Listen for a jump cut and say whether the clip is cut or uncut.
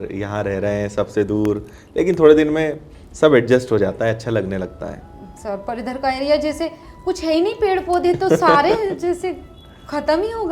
uncut